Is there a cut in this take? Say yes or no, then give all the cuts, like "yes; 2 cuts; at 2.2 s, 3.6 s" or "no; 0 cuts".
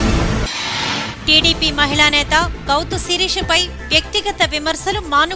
yes; 1 cut; at 1.0 s